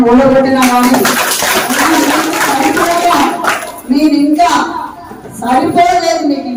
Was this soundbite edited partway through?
no; 0 cuts

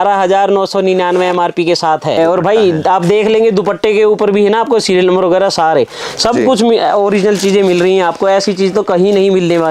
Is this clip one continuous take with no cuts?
no; 1 cut; at 2.2 s

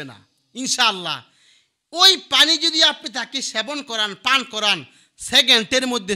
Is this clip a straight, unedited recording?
yes; 0 cuts

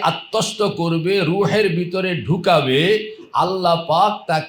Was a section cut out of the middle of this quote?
no; 0 cuts

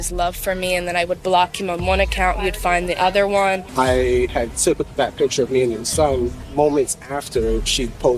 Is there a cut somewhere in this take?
yes; 3 cuts; at 3.7 s, 4.3 s, 6.4 s

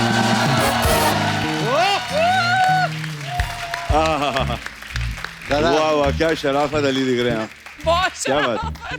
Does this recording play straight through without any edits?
yes; 0 cuts

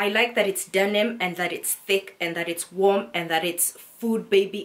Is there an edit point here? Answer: no; 0 cuts

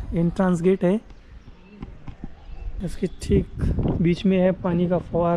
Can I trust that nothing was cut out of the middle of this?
no; 1 cut; at 2.7 s

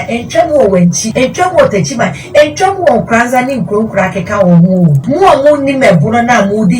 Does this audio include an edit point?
yes; 2 cuts; at 1.0 s, 5.0 s

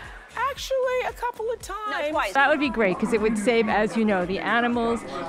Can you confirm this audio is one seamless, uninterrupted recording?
yes; 0 cuts

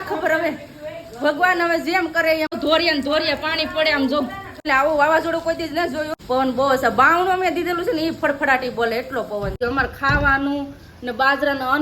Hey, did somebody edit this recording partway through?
yes; 4 cuts; at 2.5 s, 4.7 s, 6.1 s, 9.6 s

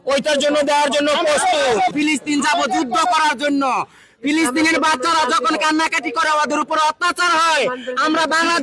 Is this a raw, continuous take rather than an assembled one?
no; 1 cut; at 1.9 s

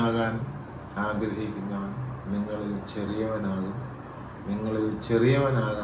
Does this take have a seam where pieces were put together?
no; 0 cuts

